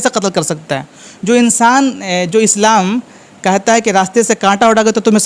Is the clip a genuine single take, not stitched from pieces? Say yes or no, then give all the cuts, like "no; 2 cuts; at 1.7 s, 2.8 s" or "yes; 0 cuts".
yes; 0 cuts